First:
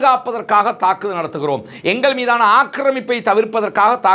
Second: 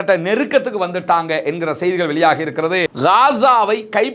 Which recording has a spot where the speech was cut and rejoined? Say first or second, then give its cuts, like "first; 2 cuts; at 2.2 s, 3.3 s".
second; 1 cut; at 2.9 s